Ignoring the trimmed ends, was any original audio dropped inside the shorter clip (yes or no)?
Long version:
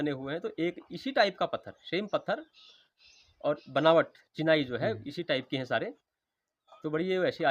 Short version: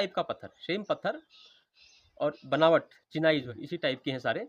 yes